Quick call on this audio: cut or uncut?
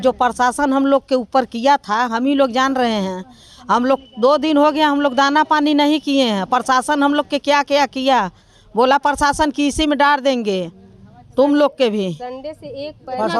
uncut